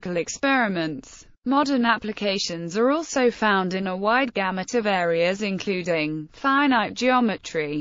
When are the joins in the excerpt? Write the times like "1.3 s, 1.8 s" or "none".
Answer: 1.1 s